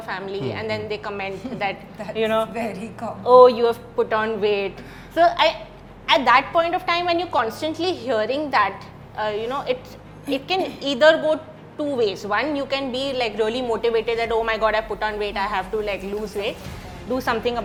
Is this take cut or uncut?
uncut